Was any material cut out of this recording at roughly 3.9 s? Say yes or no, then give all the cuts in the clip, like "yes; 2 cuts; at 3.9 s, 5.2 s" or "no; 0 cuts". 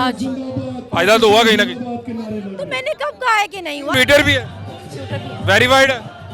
yes; 1 cut; at 3.9 s